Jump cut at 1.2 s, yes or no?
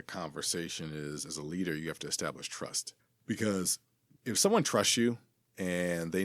no